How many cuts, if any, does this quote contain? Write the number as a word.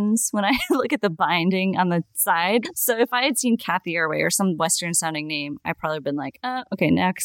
one